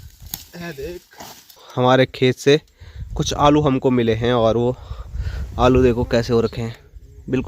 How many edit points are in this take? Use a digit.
1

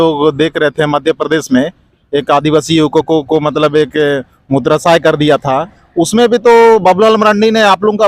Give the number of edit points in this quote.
0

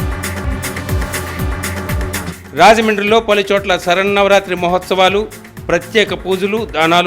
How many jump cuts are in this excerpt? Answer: 1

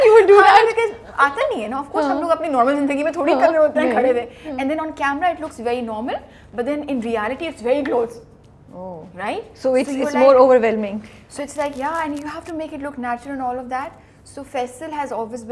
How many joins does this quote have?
0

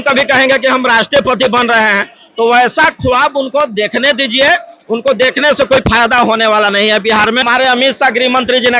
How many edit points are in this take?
1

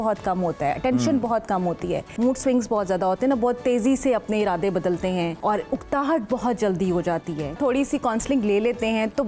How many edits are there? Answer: 3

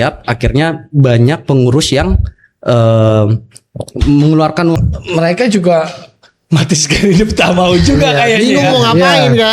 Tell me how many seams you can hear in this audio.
1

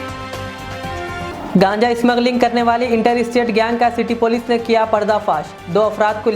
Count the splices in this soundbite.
1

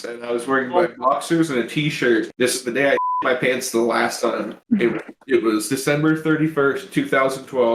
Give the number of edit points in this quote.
1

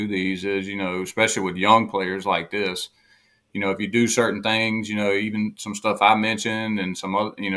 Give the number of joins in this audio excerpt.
0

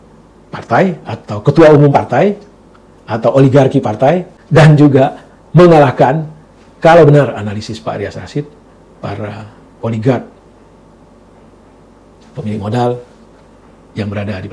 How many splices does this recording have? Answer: 1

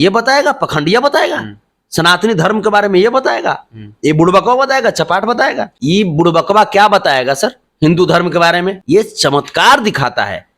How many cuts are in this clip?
2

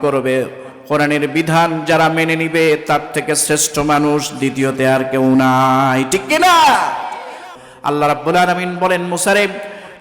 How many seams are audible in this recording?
1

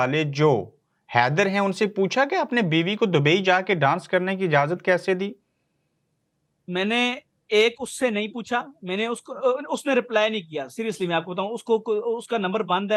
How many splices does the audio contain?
0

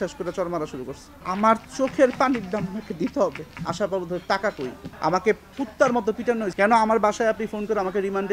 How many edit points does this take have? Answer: 4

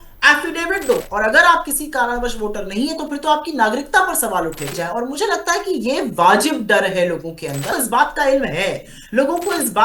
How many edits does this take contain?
3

